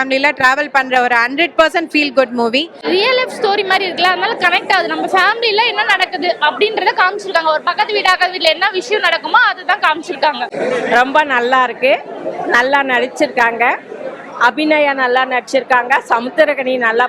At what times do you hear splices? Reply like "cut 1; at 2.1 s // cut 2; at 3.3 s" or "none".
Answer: cut 1; at 2.7 s // cut 2; at 10.5 s